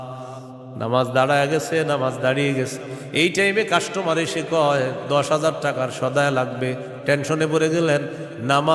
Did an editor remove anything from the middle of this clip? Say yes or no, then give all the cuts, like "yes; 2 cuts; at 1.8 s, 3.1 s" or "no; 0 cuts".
no; 0 cuts